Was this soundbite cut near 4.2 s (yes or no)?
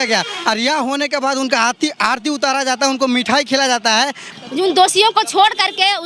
yes